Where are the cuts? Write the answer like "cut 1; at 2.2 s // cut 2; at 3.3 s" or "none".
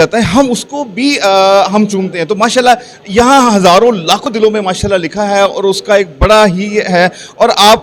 none